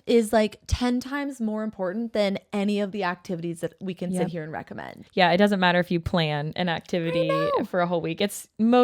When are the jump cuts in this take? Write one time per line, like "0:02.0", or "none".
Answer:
0:05.0